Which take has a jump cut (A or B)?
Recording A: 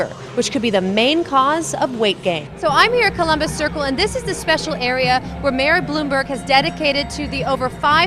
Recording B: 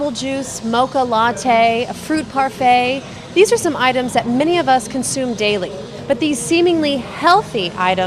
A